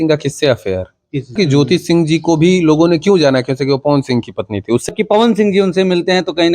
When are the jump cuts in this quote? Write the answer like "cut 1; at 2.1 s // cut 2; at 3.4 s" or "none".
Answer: cut 1; at 1.4 s // cut 2; at 4.9 s